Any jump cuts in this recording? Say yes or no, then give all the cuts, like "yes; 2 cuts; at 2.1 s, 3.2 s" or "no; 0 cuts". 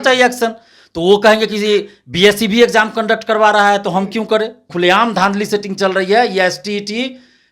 yes; 1 cut; at 4.6 s